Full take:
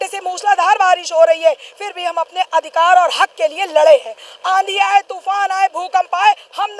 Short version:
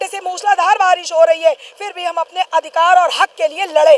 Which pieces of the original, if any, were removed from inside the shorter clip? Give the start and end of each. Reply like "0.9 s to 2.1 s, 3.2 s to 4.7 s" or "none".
none